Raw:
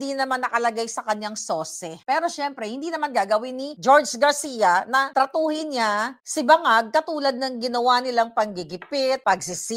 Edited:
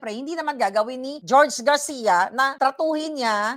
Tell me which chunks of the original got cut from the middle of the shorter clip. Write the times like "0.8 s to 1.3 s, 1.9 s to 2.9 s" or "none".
none